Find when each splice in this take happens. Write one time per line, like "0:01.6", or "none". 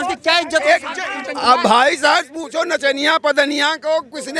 0:01.2